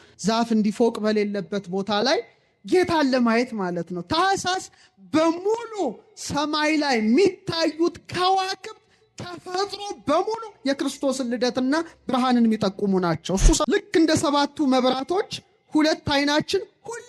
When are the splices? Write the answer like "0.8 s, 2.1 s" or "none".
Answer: 13.6 s